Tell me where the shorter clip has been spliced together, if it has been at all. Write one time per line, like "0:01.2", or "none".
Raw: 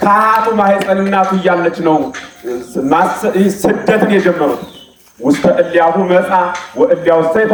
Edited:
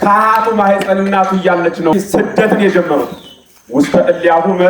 0:01.9